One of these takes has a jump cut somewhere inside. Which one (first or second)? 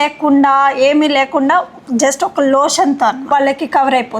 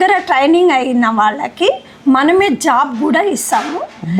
first